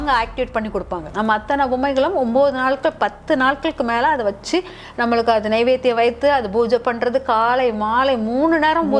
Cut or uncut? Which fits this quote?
cut